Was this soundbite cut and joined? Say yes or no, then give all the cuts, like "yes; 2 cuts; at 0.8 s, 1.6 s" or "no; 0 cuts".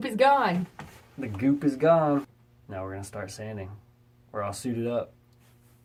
no; 0 cuts